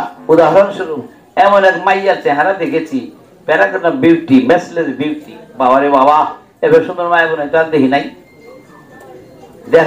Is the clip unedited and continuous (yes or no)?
yes